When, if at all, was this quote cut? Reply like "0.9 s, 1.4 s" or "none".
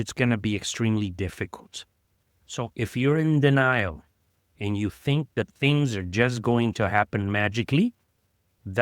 2.6 s